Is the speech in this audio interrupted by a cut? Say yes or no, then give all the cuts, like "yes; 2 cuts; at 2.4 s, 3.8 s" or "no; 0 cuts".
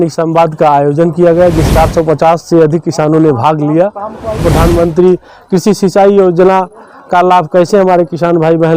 yes; 2 cuts; at 1.6 s, 4.5 s